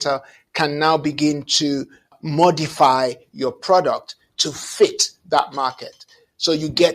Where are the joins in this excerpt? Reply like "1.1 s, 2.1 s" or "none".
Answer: 2.1 s